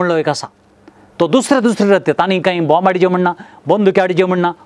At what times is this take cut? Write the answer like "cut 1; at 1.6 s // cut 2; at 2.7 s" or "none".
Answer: none